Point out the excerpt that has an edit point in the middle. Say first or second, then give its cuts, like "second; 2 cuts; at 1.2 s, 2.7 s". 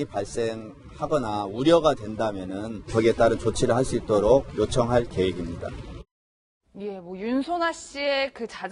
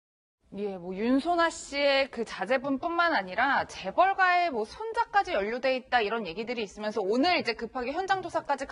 first; 1 cut; at 3.6 s